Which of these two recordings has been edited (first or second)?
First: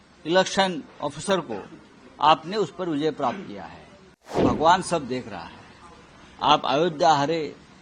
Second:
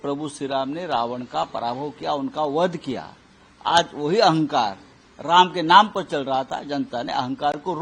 first